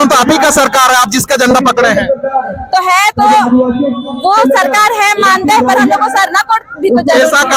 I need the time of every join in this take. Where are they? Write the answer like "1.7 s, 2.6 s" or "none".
none

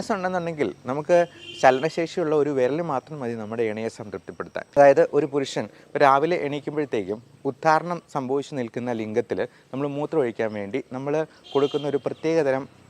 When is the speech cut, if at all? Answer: 4.8 s

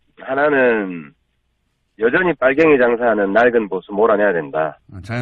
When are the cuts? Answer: 1.0 s

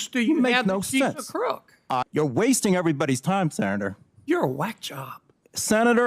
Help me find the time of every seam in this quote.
2.0 s

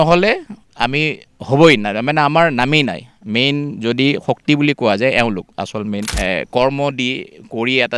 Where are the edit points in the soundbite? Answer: 6.1 s

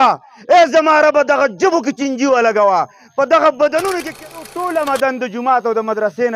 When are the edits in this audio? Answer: 4.1 s

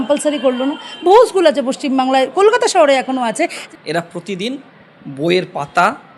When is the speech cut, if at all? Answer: 3.7 s

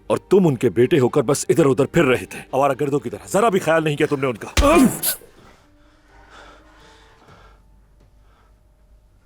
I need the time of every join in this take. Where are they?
none

